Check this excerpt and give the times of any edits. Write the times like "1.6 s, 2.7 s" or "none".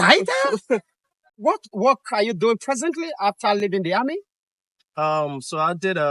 1.3 s